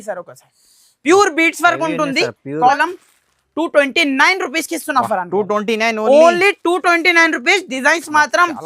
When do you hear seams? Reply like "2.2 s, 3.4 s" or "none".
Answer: 2.8 s